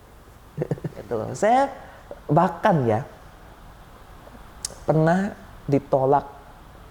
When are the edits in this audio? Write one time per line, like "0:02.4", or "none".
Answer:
0:01.0